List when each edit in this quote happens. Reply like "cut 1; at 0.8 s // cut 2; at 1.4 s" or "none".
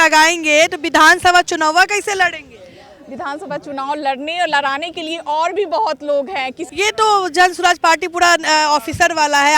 cut 1; at 6.6 s